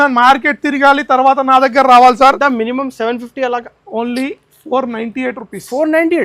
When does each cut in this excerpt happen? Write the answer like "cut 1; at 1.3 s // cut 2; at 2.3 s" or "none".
cut 1; at 2.4 s